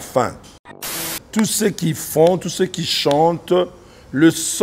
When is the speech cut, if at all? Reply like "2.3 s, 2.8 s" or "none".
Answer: 1.0 s